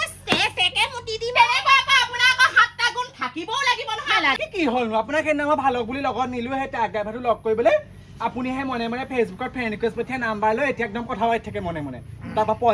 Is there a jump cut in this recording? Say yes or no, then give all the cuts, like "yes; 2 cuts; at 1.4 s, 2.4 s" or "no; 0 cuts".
yes; 1 cut; at 4.4 s